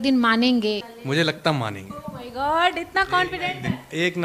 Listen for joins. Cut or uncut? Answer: cut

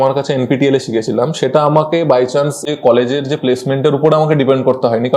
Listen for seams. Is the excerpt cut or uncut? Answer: cut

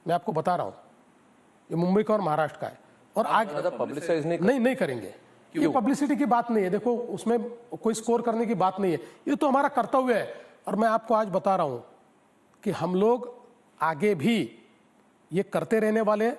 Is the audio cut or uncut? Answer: uncut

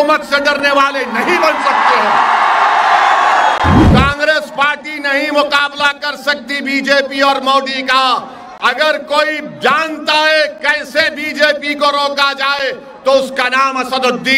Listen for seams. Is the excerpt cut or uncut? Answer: cut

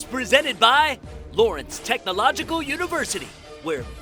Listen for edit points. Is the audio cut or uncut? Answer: uncut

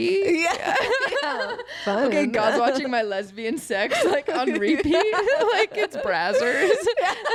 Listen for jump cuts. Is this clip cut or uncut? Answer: uncut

